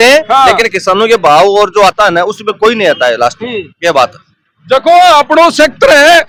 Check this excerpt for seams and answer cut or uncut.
uncut